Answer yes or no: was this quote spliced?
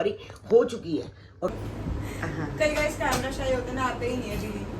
yes